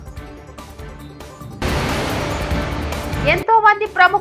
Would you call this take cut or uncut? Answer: cut